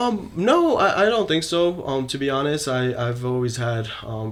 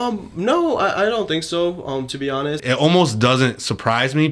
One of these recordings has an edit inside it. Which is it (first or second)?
second